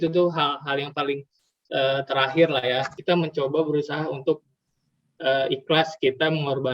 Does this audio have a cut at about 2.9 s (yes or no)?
yes